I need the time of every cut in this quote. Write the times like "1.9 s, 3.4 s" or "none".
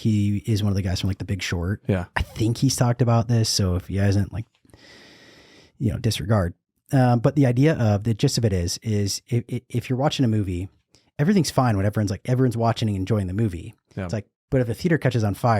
none